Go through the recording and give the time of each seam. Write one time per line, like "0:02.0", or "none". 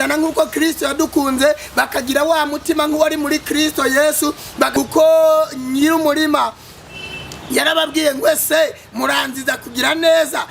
0:04.7